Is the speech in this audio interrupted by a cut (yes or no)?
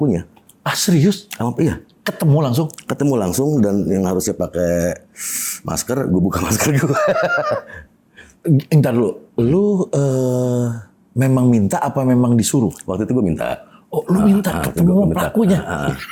no